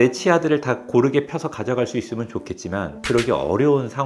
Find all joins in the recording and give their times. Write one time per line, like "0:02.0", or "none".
none